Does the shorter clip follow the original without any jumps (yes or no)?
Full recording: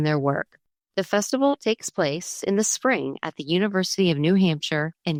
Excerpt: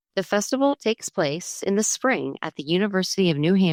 yes